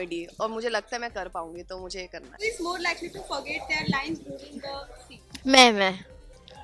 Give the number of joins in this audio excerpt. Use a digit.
0